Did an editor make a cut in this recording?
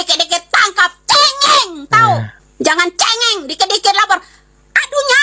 yes; 1 cut; at 2.4 s

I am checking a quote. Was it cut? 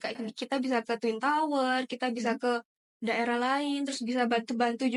no; 0 cuts

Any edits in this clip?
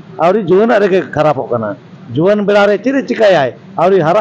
no; 0 cuts

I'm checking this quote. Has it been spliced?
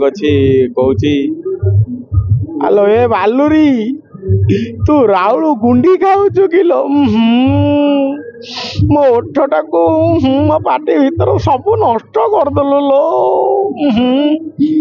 no; 0 cuts

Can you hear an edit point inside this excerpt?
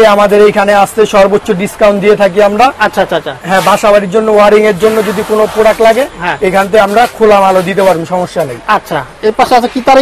no; 0 cuts

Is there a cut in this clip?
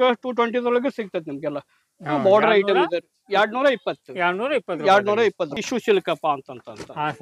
yes; 1 cut; at 5.6 s

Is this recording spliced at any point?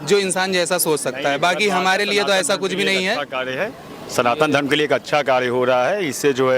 no; 0 cuts

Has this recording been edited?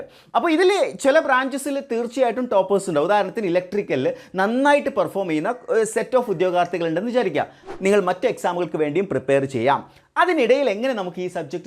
yes; 1 cut; at 7.7 s

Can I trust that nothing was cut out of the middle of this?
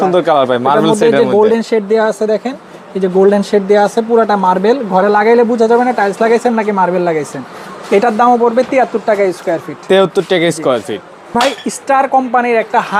yes; 0 cuts

